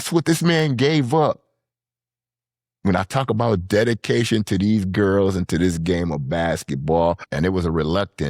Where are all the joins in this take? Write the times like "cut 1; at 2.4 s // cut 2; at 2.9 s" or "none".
cut 1; at 7.3 s